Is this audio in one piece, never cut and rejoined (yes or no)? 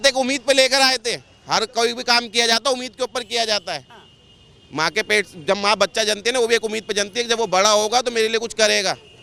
yes